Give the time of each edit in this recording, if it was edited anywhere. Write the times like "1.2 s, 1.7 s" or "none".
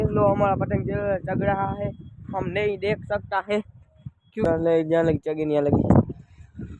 4.5 s